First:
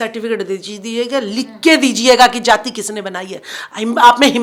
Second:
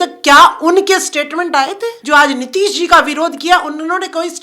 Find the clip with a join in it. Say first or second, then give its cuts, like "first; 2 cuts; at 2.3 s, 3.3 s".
second; 1 cut; at 1.9 s